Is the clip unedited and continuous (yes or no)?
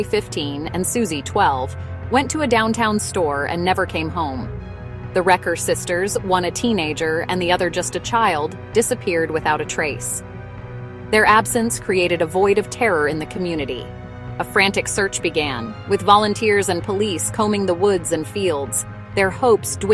yes